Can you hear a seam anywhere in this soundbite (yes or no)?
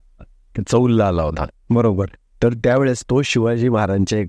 no